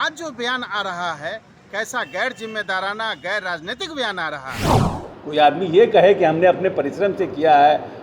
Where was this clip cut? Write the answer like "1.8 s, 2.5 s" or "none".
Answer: 4.5 s, 5.1 s